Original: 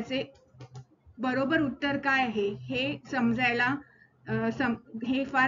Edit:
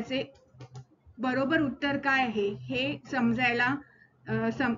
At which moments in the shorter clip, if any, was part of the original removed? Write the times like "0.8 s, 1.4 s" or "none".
none